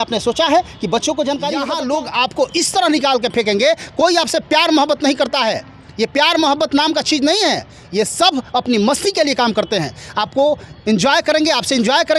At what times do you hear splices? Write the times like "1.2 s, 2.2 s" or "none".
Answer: 1.7 s